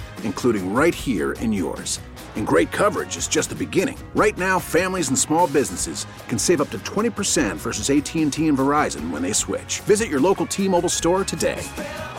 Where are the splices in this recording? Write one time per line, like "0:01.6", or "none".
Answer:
none